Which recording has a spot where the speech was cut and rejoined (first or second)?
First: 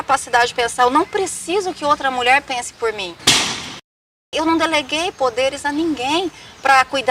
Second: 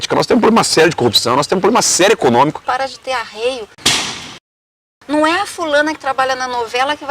second